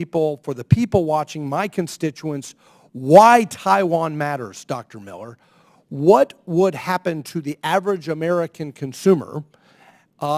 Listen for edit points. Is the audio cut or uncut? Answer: uncut